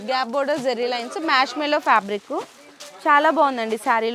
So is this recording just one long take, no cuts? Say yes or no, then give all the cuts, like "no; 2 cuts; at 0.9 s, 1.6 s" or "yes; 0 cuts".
yes; 0 cuts